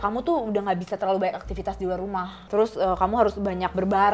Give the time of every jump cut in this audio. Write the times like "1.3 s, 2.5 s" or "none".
2.4 s